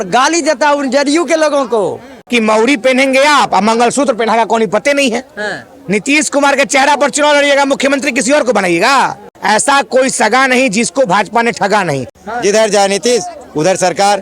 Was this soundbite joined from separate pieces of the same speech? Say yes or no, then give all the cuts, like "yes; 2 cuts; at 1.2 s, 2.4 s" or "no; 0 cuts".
yes; 3 cuts; at 2.3 s, 9.3 s, 12.1 s